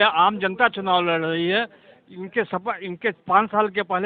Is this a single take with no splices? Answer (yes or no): yes